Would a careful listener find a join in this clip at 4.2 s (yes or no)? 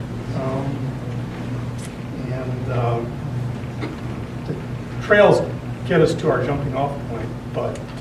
no